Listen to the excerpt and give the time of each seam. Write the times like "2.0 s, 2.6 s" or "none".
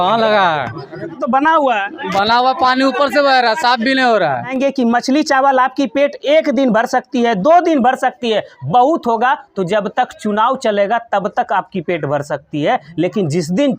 1.2 s, 4.5 s